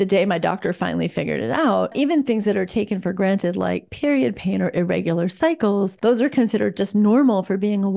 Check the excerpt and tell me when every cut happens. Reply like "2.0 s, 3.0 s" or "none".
1.9 s, 5.9 s